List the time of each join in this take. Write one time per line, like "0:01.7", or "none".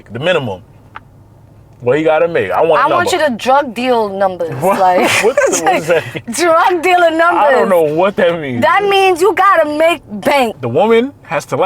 0:10.6